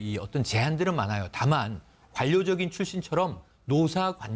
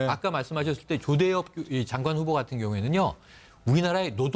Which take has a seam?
second; 1 cut; at 1.9 s

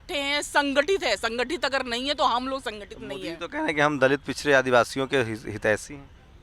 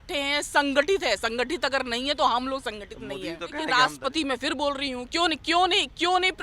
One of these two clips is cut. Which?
second; 1 cut; at 3.7 s

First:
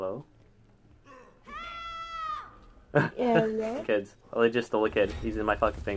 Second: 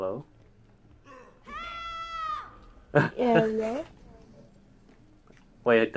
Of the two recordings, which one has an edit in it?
first; 1 cut; at 3.8 s

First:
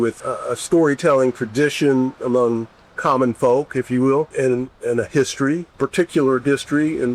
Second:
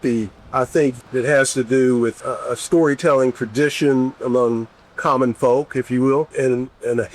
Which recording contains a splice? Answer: second; 1 cut; at 1.0 s

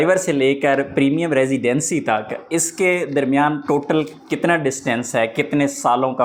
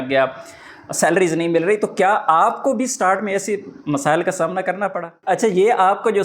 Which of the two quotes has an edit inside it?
second; 1 cut; at 5.1 s

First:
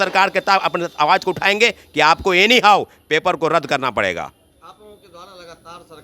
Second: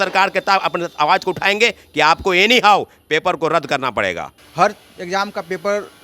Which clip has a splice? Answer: second; 1 cut; at 4.4 s

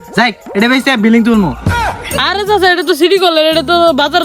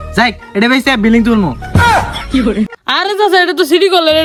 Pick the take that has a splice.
first; 1 cut; at 1.8 s

